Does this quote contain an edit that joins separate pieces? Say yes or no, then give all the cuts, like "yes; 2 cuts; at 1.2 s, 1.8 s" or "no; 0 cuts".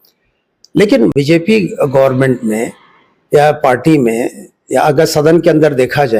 yes; 1 cut; at 1.1 s